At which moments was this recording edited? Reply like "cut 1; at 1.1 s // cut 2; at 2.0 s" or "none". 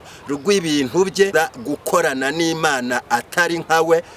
cut 1; at 1.3 s